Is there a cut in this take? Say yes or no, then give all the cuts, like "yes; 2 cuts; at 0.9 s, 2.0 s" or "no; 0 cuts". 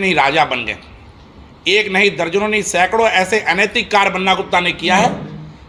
no; 0 cuts